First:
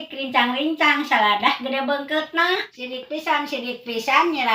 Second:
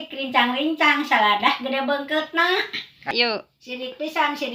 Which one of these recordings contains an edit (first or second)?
first